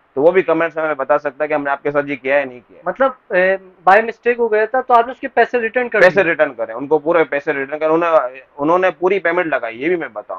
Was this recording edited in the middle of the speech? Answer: no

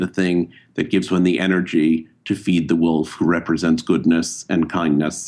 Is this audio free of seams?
yes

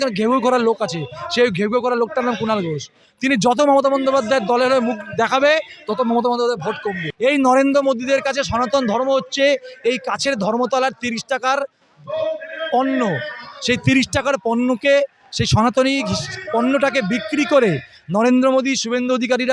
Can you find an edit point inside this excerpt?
yes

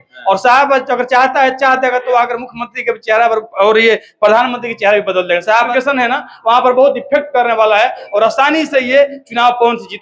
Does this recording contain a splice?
yes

